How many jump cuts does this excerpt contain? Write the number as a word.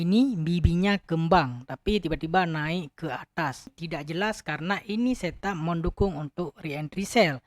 one